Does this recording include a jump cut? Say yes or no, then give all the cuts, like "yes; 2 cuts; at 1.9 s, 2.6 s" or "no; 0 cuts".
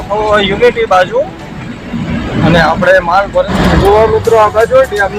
yes; 1 cut; at 3.5 s